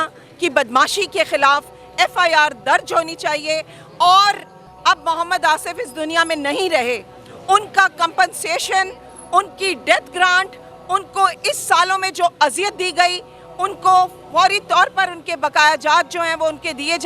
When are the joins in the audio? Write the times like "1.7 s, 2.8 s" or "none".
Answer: none

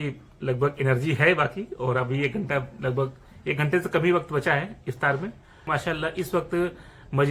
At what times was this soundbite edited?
5.7 s

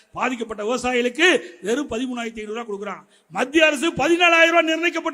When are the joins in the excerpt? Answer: none

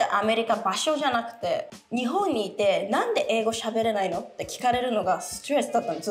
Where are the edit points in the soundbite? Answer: none

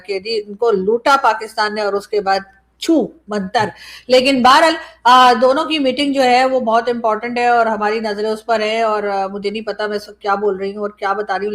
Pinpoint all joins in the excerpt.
none

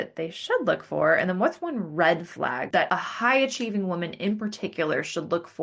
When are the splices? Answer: 2.8 s

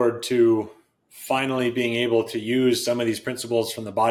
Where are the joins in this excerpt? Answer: none

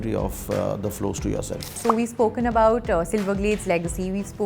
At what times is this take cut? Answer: 1.8 s

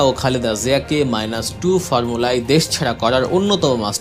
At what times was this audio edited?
none

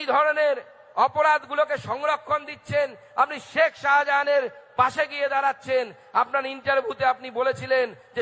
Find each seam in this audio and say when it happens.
3.4 s

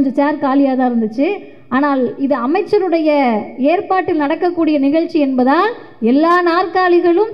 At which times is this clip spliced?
none

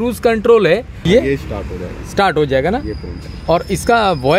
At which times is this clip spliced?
1.0 s

